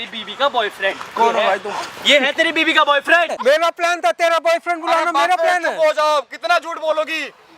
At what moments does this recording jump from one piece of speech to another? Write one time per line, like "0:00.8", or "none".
0:03.3